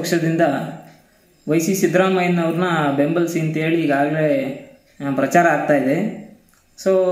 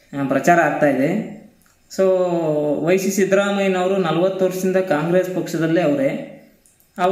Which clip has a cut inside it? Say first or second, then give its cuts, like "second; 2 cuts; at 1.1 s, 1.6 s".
second; 1 cut; at 5.2 s